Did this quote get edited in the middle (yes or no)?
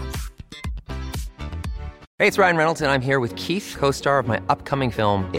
yes